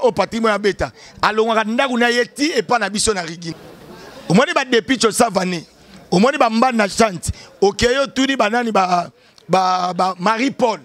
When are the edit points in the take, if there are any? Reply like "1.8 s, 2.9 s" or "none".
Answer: 3.5 s